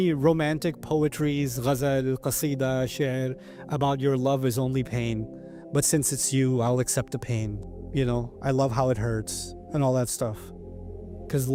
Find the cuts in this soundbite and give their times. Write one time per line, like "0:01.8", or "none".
none

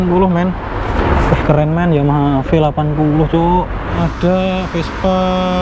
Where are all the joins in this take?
0:00.9
0:04.0

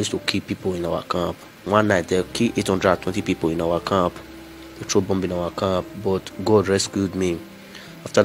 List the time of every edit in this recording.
0:01.6

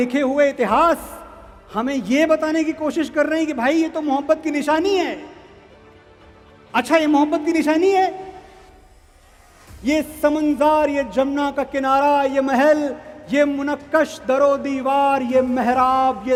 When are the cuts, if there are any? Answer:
none

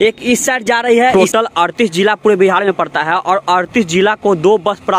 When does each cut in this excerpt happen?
0:01.1

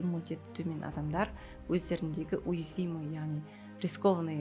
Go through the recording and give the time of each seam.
none

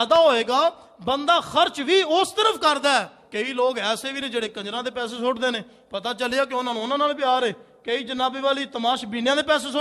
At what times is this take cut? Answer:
0:03.2

